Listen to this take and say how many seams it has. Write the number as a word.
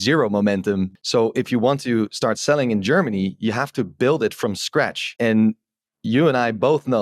two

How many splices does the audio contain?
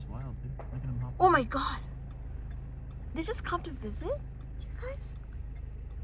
zero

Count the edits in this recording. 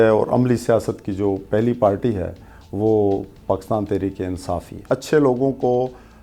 one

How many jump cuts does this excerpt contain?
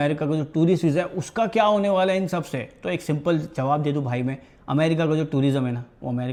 zero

